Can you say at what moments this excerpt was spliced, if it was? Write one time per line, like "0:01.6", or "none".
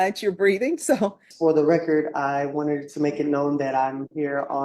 0:01.3

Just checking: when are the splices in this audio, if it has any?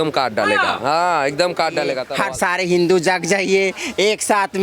0:02.0

